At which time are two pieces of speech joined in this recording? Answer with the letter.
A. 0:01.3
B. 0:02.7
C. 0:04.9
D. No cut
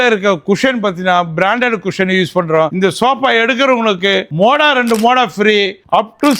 B